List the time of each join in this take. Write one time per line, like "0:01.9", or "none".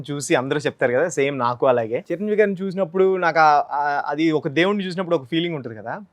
0:02.1